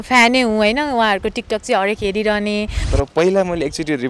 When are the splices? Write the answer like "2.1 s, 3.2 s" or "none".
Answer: 2.8 s